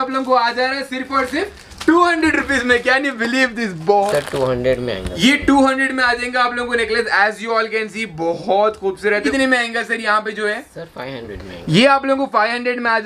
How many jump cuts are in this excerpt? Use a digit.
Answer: 2